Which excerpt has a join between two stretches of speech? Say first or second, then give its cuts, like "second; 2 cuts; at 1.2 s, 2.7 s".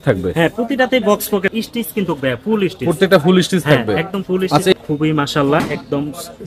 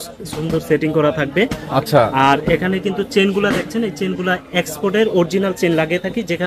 first; 2 cuts; at 1.5 s, 4.7 s